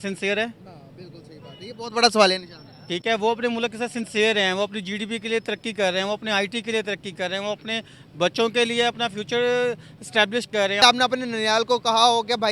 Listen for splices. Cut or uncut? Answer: cut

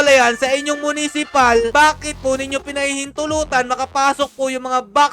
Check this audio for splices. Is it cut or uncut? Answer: cut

